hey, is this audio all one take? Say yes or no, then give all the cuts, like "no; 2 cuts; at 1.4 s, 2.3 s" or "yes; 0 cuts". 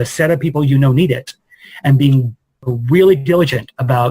no; 1 cut; at 2.6 s